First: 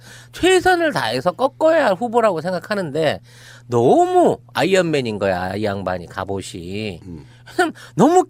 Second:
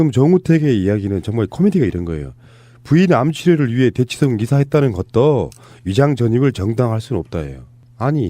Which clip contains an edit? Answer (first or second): second